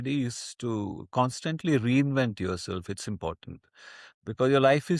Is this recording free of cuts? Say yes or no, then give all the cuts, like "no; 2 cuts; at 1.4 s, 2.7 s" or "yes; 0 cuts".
yes; 0 cuts